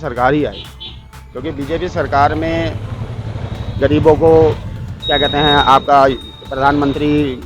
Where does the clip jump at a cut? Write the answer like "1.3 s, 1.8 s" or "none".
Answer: none